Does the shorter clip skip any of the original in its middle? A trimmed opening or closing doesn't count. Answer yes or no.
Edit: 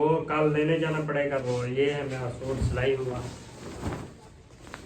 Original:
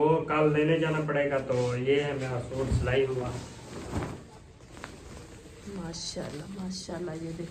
yes